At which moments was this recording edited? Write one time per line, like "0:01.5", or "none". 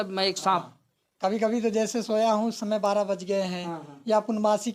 none